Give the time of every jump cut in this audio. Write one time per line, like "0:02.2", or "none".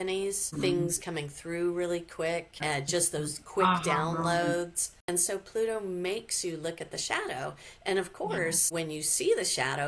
0:05.0